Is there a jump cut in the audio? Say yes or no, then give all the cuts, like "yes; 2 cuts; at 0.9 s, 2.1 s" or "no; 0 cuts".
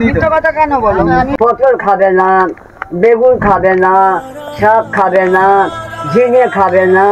yes; 1 cut; at 1.3 s